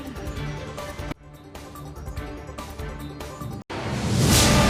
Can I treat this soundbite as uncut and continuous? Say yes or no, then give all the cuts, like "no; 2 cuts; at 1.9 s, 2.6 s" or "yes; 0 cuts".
yes; 0 cuts